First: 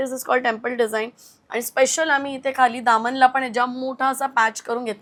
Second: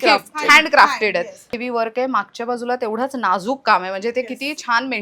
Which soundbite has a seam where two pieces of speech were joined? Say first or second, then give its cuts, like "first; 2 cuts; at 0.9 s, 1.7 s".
second; 1 cut; at 1.6 s